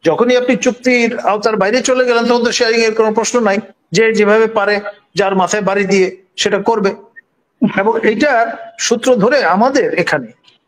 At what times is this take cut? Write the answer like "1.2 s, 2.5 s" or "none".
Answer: none

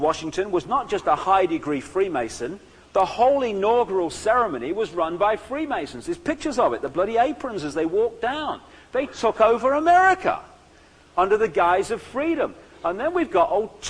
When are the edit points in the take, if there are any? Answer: 7.9 s

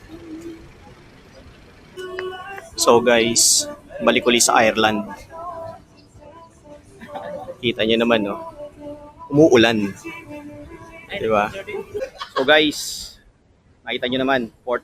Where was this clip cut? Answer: 1.8 s, 12.0 s

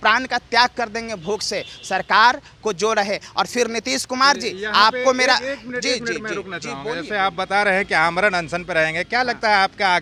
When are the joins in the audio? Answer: none

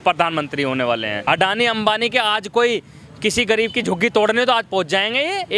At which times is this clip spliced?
1.1 s

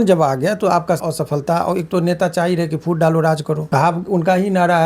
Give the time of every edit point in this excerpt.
1.0 s, 3.6 s

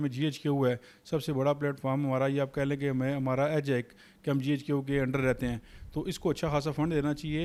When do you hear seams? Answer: none

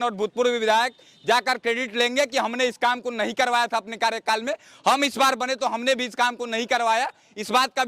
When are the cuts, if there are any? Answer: none

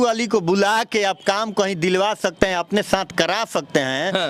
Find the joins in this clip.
none

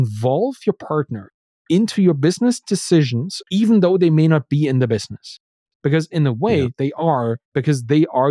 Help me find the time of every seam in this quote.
3.3 s

